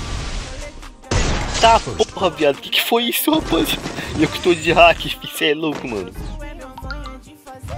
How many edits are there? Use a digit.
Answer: 0